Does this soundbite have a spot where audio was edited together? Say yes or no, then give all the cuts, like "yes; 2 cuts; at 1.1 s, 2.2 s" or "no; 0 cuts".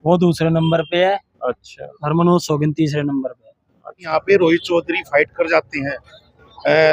yes; 1 cut; at 4.1 s